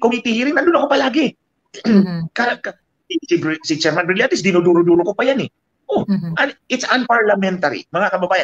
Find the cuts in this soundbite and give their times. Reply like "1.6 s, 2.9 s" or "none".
none